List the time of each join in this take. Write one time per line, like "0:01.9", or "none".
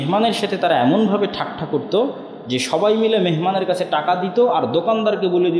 none